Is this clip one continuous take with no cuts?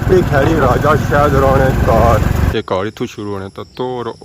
no; 1 cut; at 2.5 s

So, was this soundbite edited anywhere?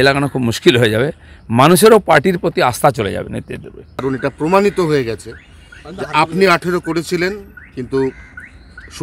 yes; 1 cut; at 4.0 s

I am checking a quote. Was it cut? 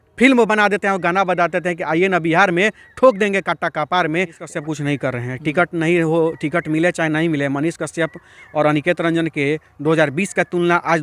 yes; 1 cut; at 4.5 s

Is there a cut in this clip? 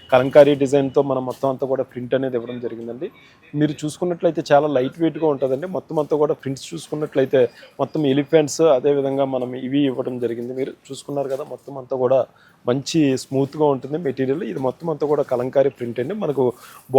no; 0 cuts

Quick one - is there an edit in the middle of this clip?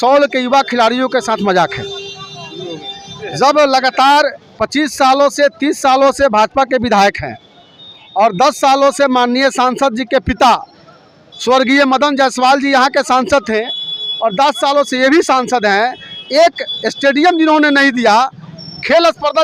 no; 0 cuts

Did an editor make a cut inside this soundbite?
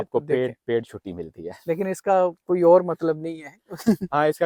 no; 0 cuts

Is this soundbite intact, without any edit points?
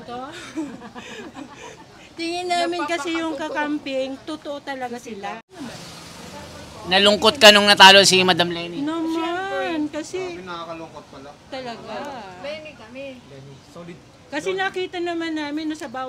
no; 1 cut; at 5.5 s

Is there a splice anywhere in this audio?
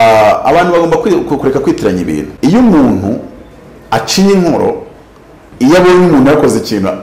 yes; 1 cut; at 2.3 s

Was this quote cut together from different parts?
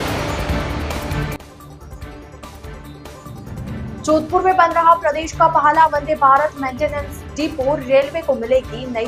yes; 1 cut; at 1.4 s

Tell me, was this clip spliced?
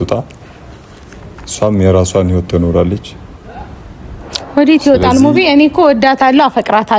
no; 0 cuts

